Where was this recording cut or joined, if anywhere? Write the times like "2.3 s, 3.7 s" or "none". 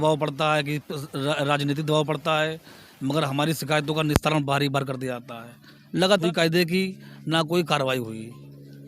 6.2 s